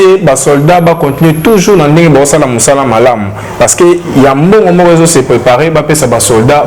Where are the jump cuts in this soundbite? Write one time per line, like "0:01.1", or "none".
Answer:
none